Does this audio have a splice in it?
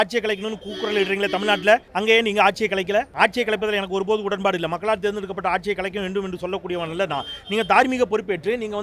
yes; 2 cuts; at 1.9 s, 3.1 s

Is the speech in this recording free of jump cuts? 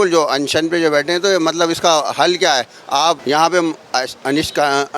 no; 1 cut; at 3.2 s

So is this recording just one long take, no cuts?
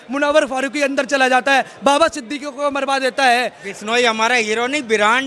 no; 1 cut; at 3.6 s

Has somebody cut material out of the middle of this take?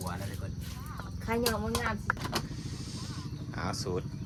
no; 0 cuts

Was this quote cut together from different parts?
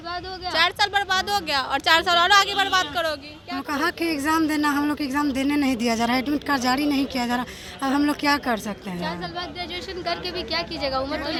no; 0 cuts

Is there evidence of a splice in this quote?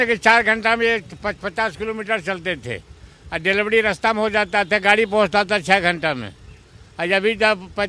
no; 0 cuts

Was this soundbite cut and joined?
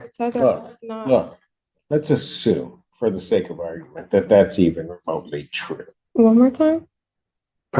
yes; 1 cut; at 6.0 s

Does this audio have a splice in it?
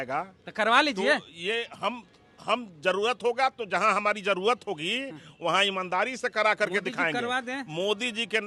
no; 0 cuts

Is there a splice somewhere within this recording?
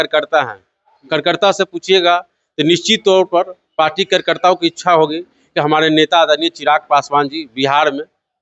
no; 0 cuts

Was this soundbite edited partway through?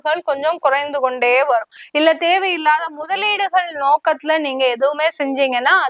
yes; 1 cut; at 1.8 s

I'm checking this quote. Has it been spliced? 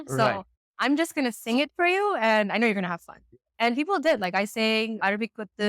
no; 0 cuts

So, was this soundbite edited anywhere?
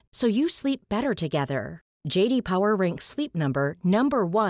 no; 0 cuts

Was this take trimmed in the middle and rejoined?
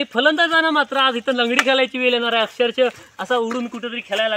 no; 0 cuts

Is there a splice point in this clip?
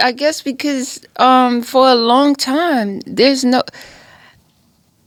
no; 0 cuts

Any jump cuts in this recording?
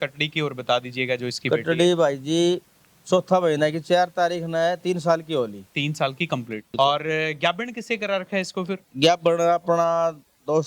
yes; 1 cut; at 6.8 s

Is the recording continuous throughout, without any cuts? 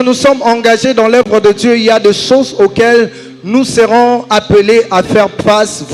yes; 0 cuts

